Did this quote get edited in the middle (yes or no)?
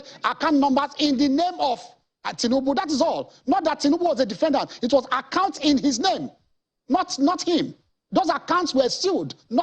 no